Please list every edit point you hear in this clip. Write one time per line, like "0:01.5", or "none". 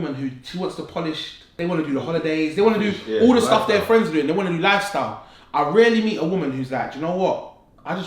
0:01.4